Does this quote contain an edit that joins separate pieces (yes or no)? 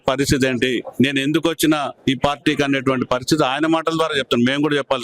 yes